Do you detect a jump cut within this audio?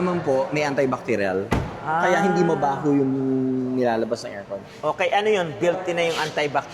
no; 0 cuts

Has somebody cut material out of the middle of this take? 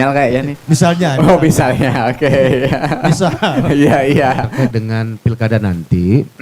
yes; 1 cut; at 4.6 s

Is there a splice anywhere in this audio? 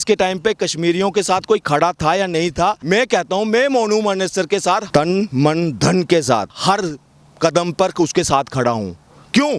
yes; 3 cuts; at 2.8 s, 4.8 s, 6.5 s

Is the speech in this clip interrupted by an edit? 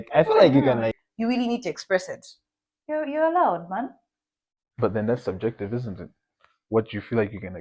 yes; 1 cut; at 1.0 s

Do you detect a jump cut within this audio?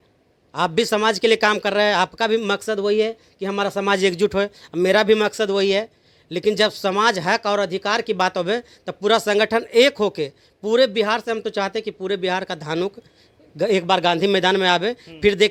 no; 0 cuts

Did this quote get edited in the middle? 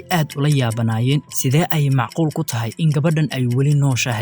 yes; 1 cut; at 1.2 s

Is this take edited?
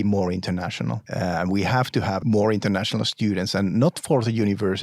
yes; 2 cuts; at 1.0 s, 2.2 s

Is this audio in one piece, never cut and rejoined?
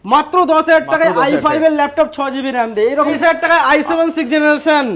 no; 1 cut; at 3.2 s

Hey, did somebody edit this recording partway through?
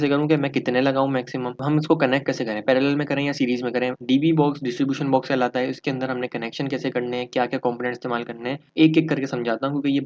yes; 3 cuts; at 1.6 s, 4.0 s, 8.6 s

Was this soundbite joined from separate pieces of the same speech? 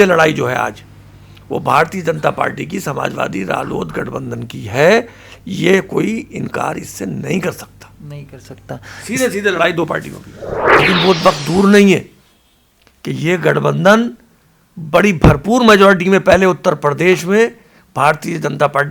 yes; 1 cut; at 10.8 s

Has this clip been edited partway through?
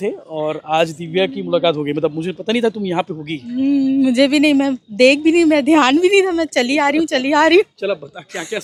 no; 0 cuts

